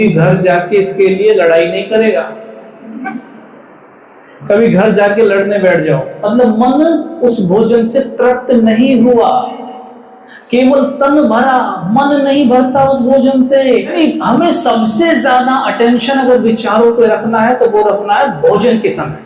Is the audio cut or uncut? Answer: cut